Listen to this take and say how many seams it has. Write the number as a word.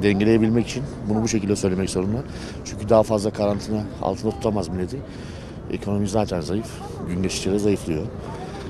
zero